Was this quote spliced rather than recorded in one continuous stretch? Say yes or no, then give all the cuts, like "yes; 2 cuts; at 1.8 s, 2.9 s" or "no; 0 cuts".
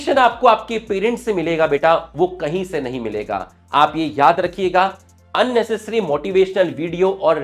no; 0 cuts